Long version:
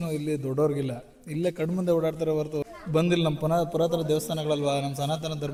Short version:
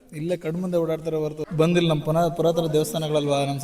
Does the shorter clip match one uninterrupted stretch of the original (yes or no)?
no